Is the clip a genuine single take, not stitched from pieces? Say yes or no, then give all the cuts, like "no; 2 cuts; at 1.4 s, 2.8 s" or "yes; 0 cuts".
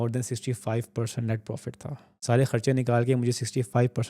no; 1 cut; at 2.1 s